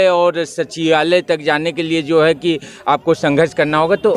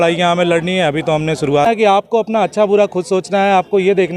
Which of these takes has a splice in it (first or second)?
second